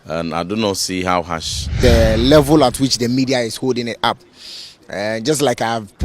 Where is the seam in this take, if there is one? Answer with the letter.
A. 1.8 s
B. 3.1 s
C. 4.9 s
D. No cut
A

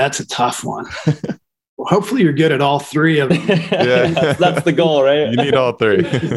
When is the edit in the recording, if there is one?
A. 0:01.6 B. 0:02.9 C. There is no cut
A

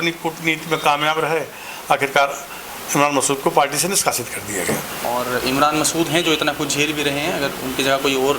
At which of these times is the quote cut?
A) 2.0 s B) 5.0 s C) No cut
B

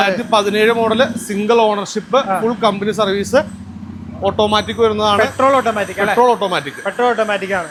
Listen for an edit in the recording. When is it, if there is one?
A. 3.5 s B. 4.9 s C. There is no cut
C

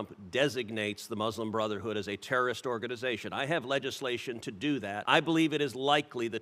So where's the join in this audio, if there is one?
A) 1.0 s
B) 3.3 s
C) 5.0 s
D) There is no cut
C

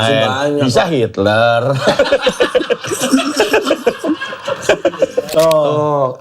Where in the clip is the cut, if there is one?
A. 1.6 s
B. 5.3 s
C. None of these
B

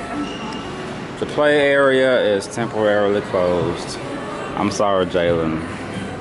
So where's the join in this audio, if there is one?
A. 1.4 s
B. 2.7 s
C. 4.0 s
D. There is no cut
D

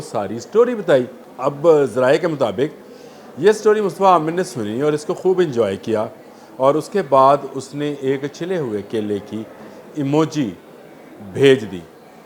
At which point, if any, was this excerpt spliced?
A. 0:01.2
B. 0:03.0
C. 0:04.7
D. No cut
A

